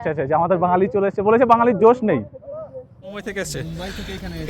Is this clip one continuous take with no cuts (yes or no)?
no